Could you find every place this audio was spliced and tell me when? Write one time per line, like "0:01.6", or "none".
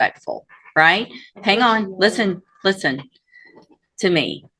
none